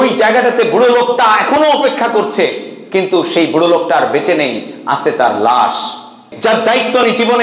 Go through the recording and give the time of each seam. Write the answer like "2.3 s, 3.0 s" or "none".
6.3 s